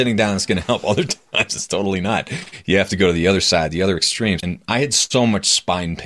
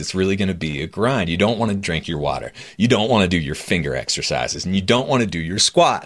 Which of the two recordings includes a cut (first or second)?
first